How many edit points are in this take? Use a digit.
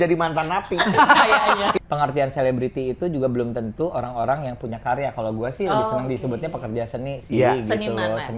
1